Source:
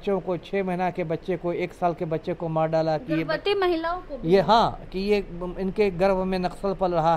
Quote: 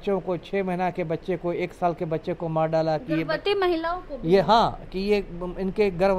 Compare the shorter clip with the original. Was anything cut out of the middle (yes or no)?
no